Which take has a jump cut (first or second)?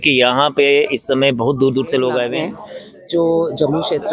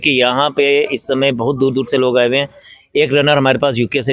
first